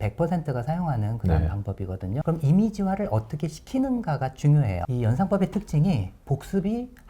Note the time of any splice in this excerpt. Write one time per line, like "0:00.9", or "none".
0:02.2
0:04.8